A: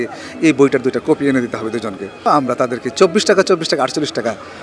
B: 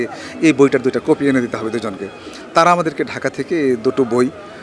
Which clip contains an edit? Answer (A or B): A